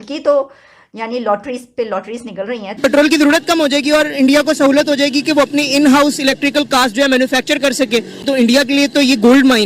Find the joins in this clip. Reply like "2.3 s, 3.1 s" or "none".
2.8 s, 8.2 s